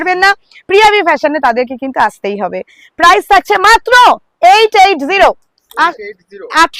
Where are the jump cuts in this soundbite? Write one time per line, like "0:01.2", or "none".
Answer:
none